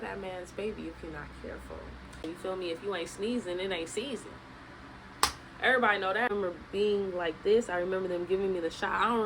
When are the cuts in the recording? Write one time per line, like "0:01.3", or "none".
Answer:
0:02.3
0:06.3